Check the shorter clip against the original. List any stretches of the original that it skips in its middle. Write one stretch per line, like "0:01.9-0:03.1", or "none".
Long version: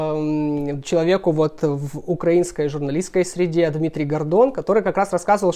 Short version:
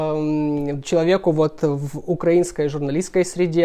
none